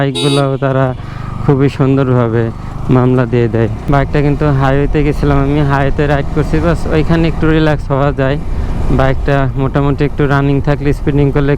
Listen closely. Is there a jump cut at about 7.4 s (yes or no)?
no